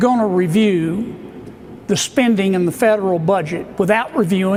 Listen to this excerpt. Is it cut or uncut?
uncut